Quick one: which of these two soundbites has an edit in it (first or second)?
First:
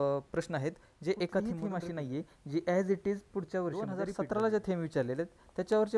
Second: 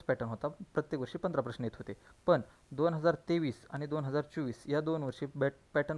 first